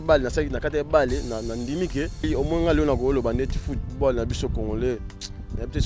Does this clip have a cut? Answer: yes; 1 cut; at 2.3 s

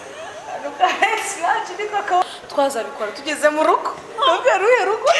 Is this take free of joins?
no; 1 cut; at 2.2 s

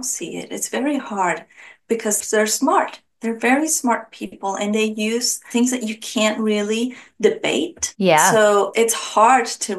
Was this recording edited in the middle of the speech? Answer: yes; 2 cuts; at 2.2 s, 8.7 s

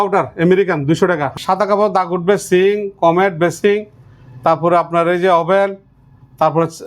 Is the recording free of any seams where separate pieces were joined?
no; 1 cut; at 1.3 s

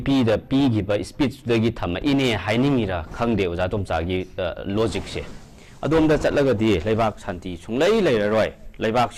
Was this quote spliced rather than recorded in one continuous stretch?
no; 0 cuts

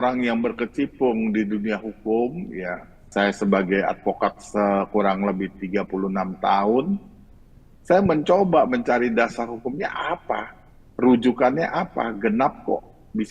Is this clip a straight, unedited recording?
no; 1 cut; at 3.1 s

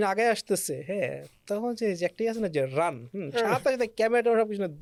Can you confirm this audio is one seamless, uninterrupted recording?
yes; 0 cuts

